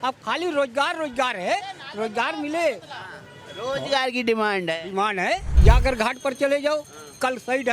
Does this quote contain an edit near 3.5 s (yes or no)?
no